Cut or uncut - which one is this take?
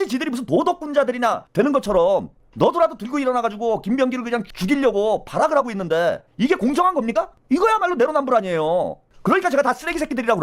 uncut